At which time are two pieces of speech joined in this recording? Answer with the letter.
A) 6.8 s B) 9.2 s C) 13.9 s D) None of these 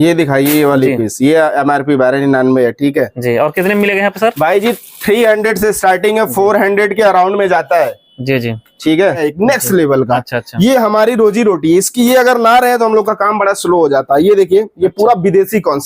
B